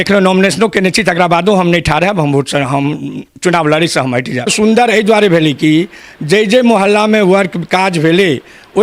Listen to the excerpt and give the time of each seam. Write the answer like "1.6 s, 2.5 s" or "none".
4.5 s